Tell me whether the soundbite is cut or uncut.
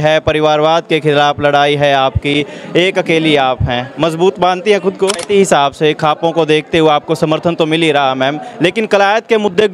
cut